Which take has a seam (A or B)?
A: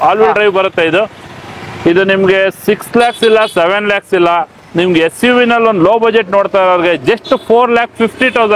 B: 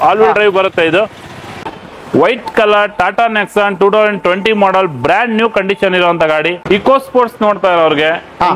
B